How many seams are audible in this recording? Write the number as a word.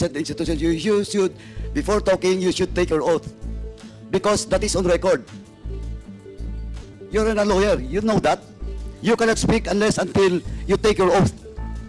two